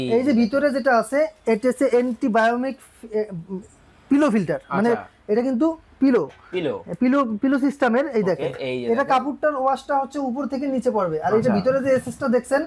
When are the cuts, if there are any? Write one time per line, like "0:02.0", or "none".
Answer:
none